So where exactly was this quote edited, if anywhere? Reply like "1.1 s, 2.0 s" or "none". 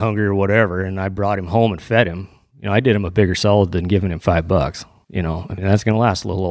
none